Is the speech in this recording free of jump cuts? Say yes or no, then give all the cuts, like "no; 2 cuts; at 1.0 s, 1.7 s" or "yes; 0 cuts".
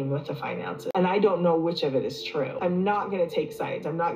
no; 2 cuts; at 0.9 s, 2.5 s